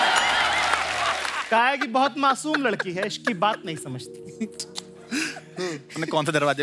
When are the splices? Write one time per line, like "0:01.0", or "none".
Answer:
0:01.3